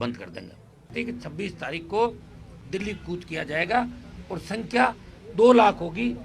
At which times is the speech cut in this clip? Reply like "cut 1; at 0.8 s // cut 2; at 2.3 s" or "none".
cut 1; at 0.9 s